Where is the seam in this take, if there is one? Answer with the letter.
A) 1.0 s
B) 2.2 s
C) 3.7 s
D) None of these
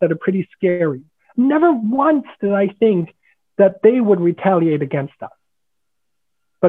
A